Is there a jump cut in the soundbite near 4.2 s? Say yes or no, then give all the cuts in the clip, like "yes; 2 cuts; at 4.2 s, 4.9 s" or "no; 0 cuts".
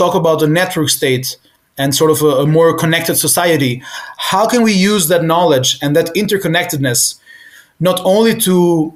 no; 0 cuts